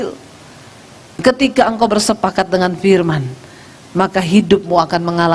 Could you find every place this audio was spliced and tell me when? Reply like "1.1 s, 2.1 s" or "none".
1.2 s

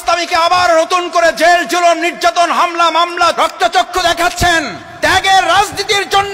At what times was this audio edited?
3.3 s, 4.8 s

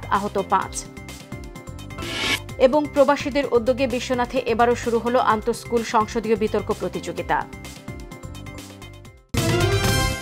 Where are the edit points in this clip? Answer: 9.3 s

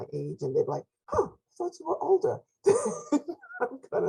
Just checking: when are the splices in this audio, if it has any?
none

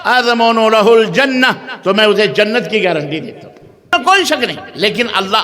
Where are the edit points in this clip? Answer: 3.9 s

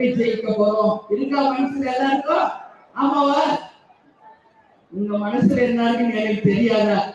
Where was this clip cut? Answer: none

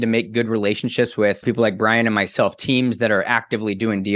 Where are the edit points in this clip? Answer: none

